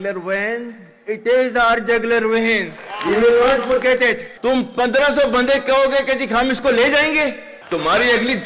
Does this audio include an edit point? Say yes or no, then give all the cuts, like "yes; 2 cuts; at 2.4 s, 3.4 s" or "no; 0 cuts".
yes; 2 cuts; at 4.3 s, 7.5 s